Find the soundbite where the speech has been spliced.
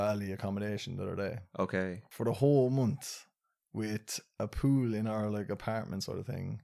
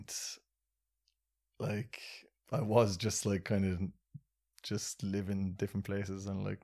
first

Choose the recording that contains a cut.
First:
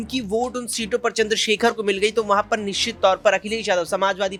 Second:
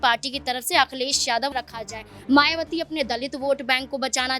second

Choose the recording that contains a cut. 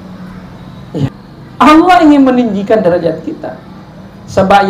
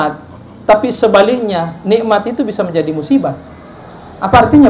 first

